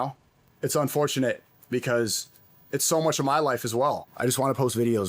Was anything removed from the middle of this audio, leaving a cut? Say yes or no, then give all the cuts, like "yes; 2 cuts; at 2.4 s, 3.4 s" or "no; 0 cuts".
yes; 1 cut; at 4.1 s